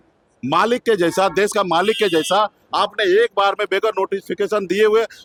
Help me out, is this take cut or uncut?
uncut